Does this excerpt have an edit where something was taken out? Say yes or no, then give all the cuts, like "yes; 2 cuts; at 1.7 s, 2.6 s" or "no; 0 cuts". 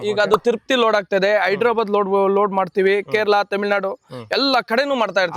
no; 0 cuts